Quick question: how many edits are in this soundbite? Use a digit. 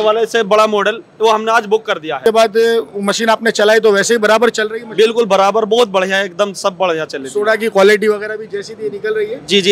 1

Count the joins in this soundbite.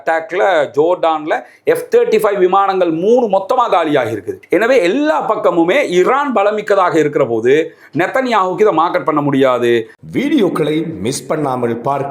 1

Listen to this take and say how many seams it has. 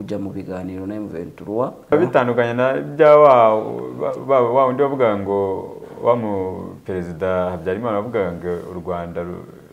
1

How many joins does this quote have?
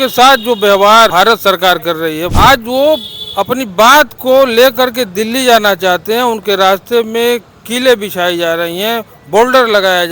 2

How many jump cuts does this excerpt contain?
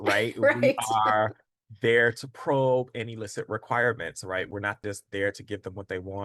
1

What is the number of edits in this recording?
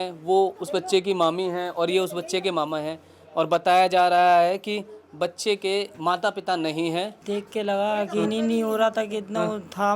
1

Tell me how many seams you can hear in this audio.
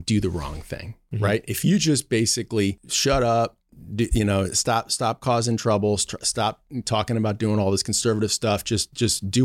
1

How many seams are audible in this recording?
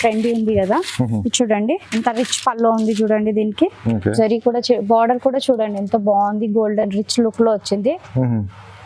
0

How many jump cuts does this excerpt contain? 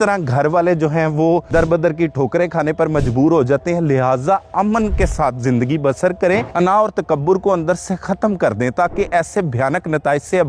2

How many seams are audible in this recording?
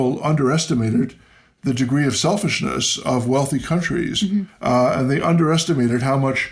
0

